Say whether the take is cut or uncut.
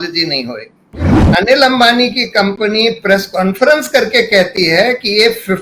cut